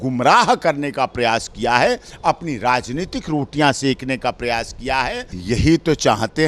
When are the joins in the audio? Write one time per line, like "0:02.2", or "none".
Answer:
0:05.3